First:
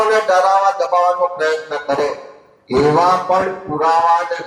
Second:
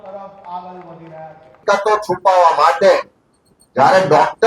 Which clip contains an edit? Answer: second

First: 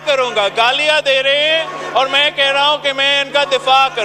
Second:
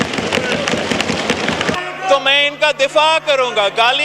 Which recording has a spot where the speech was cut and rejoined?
second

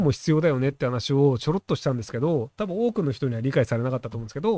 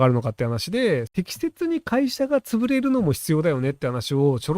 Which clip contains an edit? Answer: second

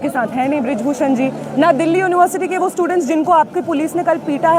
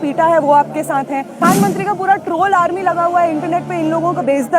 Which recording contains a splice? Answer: second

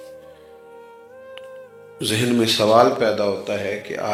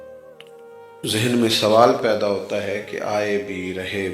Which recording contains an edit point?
second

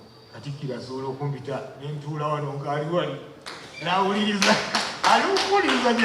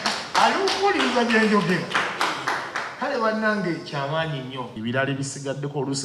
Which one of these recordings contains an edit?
second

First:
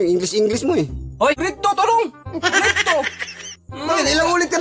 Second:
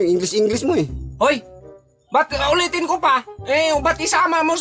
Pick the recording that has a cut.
first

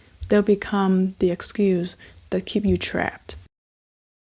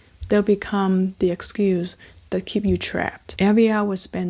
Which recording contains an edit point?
second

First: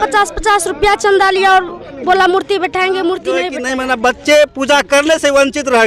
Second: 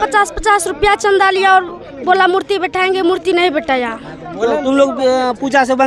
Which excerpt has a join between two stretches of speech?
first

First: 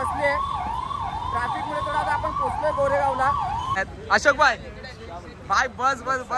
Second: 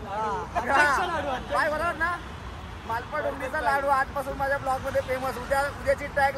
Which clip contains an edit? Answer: first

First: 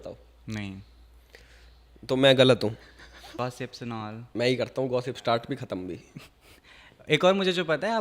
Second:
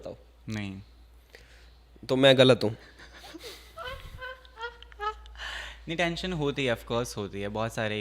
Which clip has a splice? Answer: first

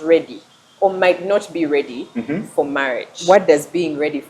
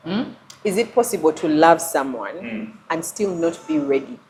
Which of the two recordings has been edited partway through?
first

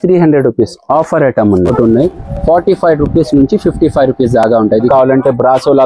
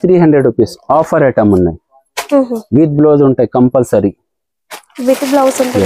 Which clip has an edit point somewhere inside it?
first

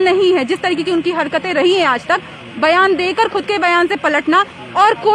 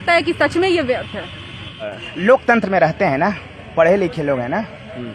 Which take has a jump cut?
second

